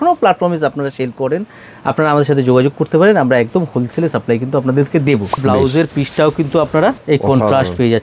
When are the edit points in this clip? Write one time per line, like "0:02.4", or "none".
0:05.5
0:07.0